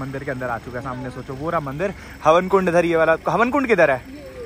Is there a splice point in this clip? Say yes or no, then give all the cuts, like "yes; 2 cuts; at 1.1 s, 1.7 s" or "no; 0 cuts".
no; 0 cuts